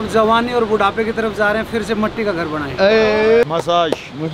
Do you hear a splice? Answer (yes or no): yes